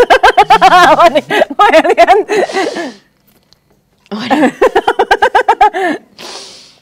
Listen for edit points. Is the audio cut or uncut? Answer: uncut